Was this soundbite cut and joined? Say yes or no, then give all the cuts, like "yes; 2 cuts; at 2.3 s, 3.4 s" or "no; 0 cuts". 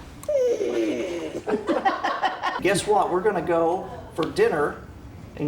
yes; 1 cut; at 2.6 s